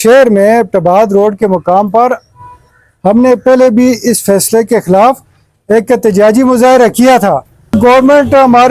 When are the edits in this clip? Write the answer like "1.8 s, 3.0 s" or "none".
7.8 s